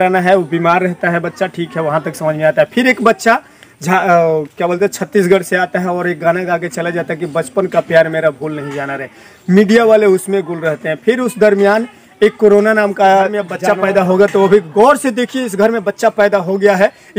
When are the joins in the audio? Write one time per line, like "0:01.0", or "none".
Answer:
0:13.5